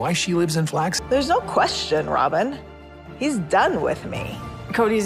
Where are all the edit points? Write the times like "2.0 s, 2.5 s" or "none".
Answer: 1.0 s